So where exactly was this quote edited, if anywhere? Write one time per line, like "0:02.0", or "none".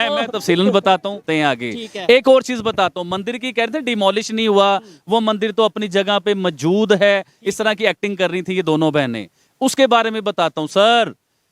0:01.2